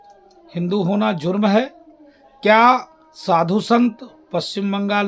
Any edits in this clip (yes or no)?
no